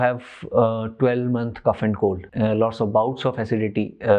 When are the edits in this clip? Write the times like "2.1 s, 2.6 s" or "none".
2.3 s